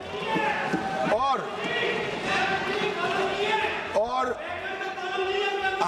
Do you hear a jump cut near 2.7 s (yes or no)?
no